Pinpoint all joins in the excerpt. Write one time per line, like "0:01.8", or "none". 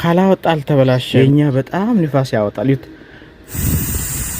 0:01.0